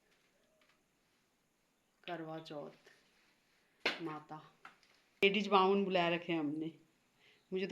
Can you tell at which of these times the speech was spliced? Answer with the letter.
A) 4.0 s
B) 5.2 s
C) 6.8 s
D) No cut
B